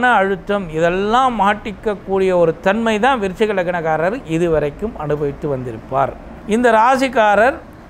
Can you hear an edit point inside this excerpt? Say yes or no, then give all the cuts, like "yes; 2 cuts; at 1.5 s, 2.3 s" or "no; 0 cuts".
yes; 1 cut; at 6.3 s